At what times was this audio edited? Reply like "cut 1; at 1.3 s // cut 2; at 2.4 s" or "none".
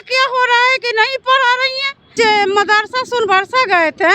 cut 1; at 2.1 s